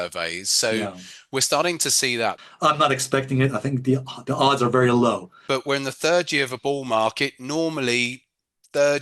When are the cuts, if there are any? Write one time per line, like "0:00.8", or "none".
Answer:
0:02.4
0:05.3